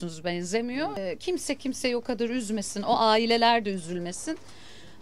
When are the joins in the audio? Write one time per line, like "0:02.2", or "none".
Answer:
0:01.0